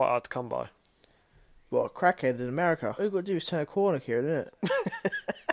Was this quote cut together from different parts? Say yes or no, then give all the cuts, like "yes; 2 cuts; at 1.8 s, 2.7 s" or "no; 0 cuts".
yes; 1 cut; at 3.0 s